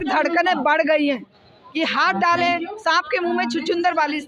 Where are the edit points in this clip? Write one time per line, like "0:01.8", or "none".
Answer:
none